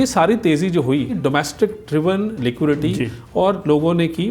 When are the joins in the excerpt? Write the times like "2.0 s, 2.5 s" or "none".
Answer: 1.2 s